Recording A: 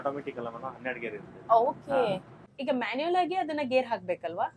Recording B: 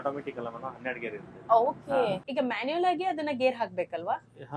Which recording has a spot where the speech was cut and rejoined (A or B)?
B